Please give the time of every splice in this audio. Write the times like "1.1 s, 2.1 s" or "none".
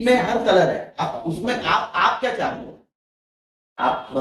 none